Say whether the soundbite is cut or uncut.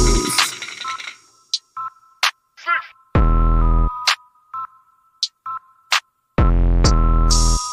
uncut